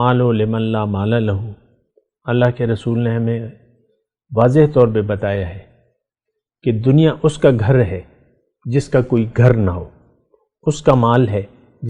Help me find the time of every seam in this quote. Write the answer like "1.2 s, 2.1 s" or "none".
none